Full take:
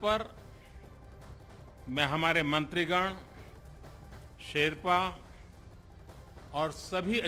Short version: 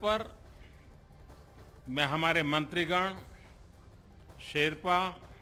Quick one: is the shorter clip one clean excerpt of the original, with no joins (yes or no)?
yes